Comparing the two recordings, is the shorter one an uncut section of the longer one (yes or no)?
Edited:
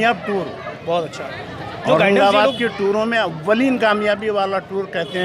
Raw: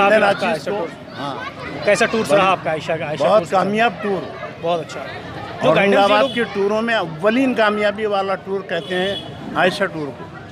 yes